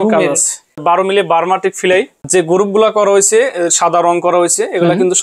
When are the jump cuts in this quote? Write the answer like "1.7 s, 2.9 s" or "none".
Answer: 0.8 s, 2.3 s